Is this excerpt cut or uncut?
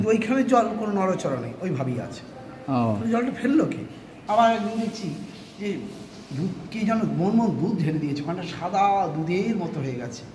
cut